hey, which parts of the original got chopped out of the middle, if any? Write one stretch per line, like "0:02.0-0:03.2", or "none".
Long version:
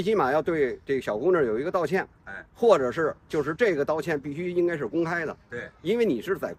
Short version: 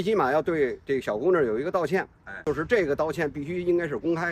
0:02.3-0:03.2